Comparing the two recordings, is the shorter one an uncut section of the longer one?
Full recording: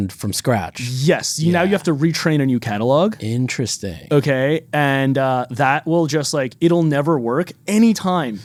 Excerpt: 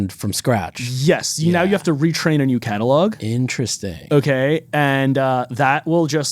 yes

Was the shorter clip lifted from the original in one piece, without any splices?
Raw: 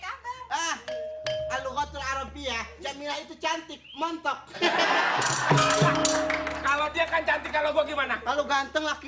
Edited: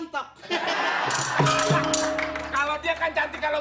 yes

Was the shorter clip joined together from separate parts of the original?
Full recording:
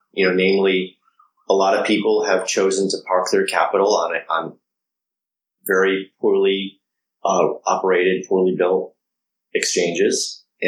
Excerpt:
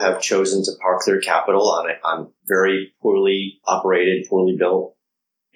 yes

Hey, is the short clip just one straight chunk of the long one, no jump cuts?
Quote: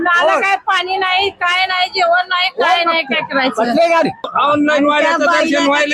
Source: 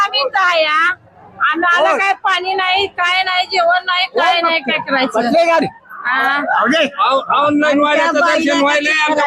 no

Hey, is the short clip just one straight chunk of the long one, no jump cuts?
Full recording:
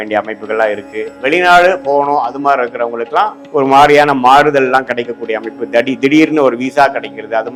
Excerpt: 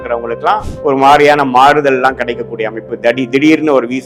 yes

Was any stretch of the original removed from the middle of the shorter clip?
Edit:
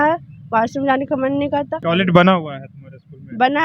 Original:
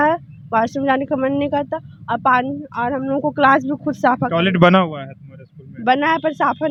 yes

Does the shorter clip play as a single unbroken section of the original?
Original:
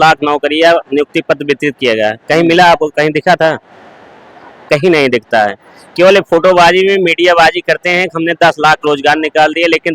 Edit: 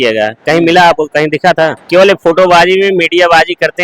no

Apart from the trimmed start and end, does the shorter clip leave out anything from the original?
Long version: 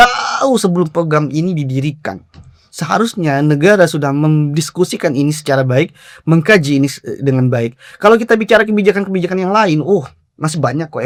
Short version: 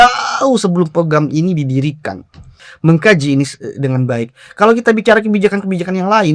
yes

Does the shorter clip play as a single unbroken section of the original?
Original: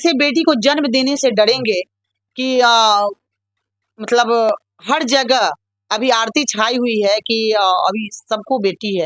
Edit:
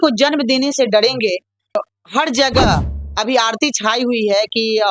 no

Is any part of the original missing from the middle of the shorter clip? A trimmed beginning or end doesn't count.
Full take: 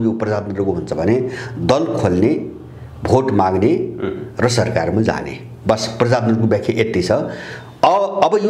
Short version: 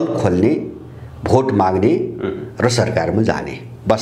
no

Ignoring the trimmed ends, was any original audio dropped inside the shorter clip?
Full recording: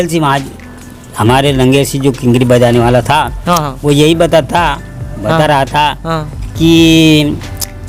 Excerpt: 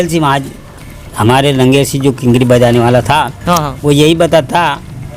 no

